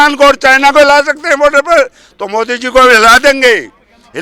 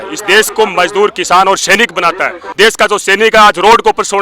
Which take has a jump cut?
second; 1 cut; at 2.4 s

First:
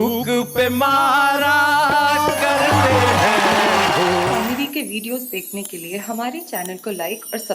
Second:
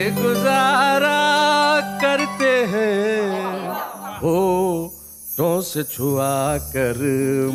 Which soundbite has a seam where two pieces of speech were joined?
first; 1 cut; at 4.4 s

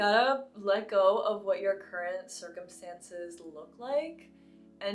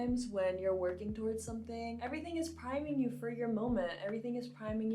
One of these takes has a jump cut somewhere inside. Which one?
second; 1 cut; at 2.0 s

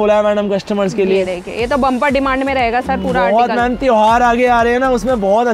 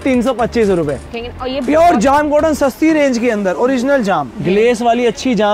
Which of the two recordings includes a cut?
second; 2 cuts; at 1.2 s, 4.3 s

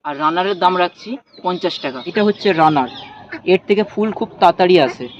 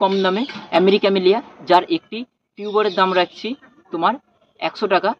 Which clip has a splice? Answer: first; 1 cut; at 2.1 s

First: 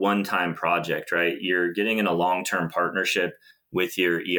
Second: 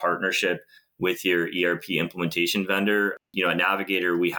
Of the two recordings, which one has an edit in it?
second; 1 cut; at 3.3 s

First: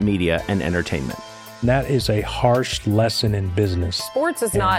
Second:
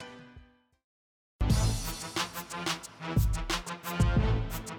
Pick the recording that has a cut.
second; 2 cuts; at 1.4 s, 2.9 s

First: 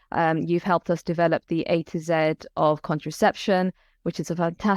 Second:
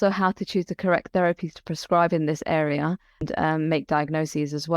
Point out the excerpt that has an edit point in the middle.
second; 1 cut; at 3.6 s

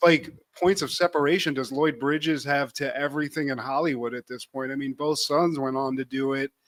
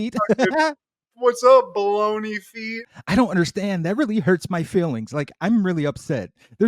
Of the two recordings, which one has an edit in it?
second; 1 cut; at 2.8 s

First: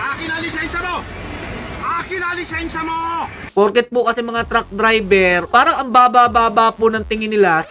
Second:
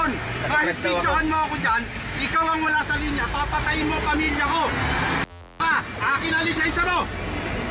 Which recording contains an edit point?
first; 2 cuts; at 3.5 s, 5.5 s

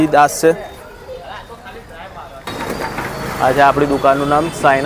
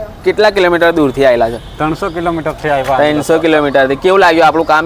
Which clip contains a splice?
first; 1 cut; at 2.5 s

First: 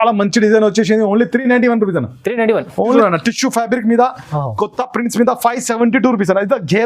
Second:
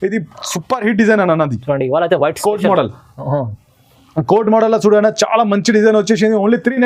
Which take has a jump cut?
first; 1 cut; at 3.0 s

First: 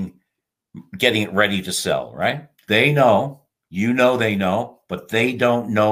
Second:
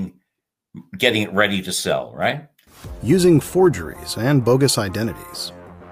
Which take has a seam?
first; 1 cut; at 2.5 s

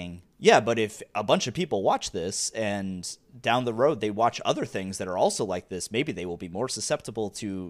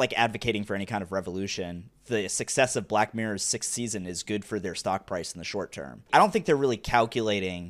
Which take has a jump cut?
second; 2 cuts; at 1.9 s, 6.1 s

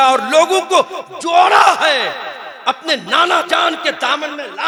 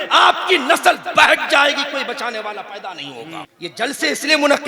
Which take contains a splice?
second; 1 cut; at 3.5 s

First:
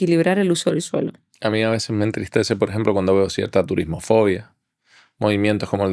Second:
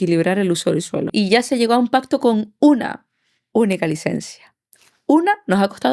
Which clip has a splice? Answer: second; 1 cut; at 1.1 s

